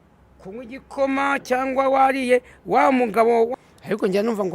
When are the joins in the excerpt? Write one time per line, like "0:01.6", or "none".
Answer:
0:03.5